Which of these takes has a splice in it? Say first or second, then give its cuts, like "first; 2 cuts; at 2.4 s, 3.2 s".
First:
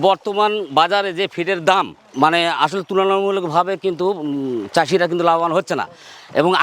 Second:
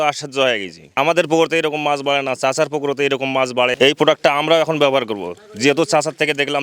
second; 1 cut; at 0.9 s